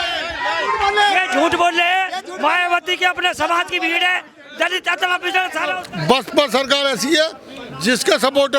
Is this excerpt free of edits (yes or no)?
no